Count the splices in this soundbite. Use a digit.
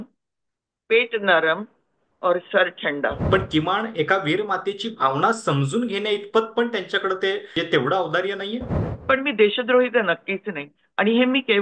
3